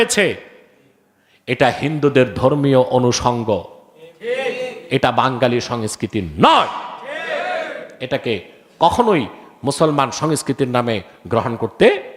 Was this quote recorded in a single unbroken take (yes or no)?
yes